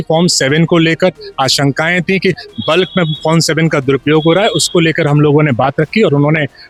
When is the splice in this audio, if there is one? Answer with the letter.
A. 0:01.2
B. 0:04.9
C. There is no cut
C